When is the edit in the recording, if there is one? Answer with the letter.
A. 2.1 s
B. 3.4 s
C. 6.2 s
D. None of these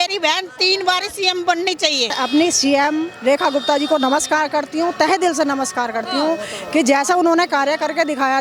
A